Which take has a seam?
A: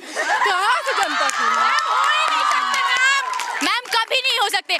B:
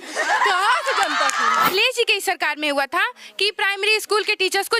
B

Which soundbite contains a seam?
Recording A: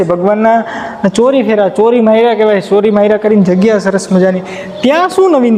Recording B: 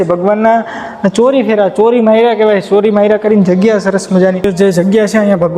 B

